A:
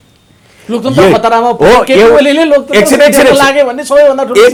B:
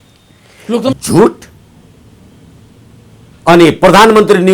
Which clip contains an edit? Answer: B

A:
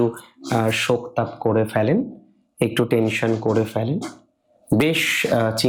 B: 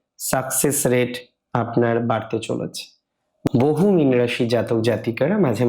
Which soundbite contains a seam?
B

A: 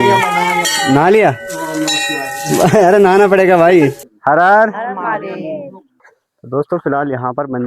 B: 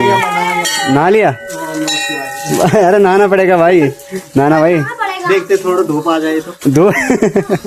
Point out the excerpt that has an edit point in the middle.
A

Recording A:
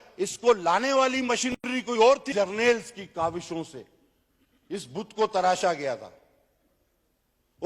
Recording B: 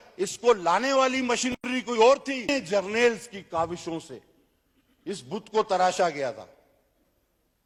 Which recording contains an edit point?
A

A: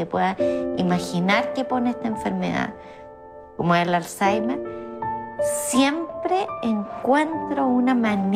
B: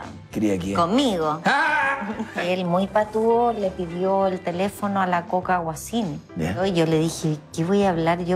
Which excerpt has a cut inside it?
B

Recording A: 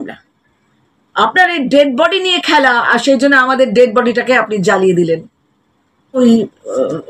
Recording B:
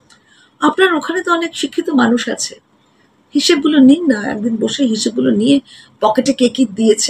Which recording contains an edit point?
A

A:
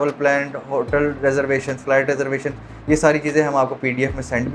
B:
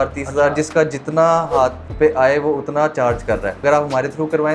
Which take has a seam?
B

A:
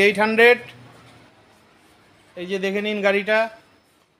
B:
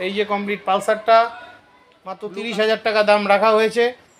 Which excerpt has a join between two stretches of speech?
B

